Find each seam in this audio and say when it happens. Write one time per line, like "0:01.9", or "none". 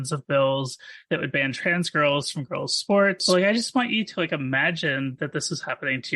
0:03.2